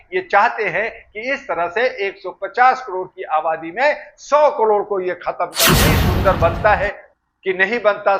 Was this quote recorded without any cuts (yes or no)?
no